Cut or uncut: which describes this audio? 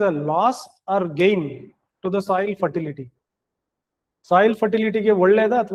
uncut